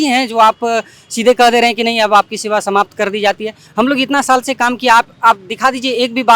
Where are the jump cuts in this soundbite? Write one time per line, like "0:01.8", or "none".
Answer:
none